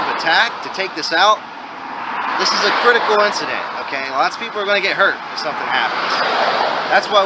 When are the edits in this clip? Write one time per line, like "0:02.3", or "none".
none